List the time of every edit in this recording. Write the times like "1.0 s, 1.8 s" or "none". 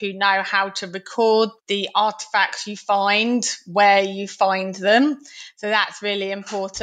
1.6 s